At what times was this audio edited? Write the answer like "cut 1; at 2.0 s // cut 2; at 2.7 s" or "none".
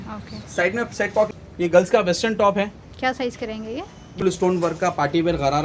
cut 1; at 1.3 s // cut 2; at 4.2 s

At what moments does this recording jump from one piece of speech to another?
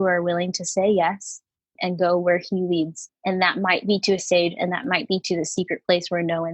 cut 1; at 1.6 s // cut 2; at 3.0 s

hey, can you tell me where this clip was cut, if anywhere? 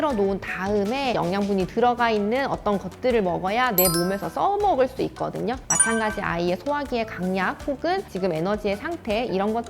cut 1; at 1.2 s // cut 2; at 5.6 s

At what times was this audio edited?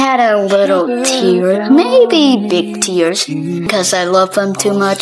cut 1; at 3.7 s

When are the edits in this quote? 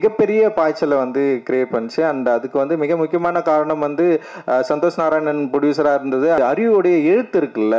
cut 1; at 6.4 s

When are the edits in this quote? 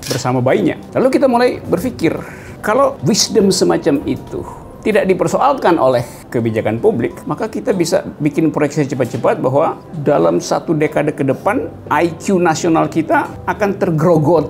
none

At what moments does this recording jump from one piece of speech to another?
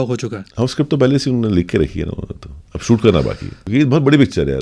cut 1; at 3.6 s

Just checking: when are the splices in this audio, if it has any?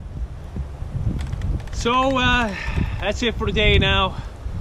none

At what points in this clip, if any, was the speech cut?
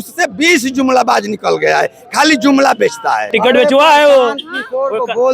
cut 1; at 3.2 s

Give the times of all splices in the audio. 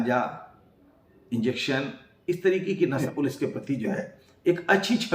cut 1; at 3.0 s

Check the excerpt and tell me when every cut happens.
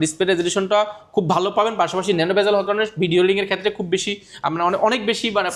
none

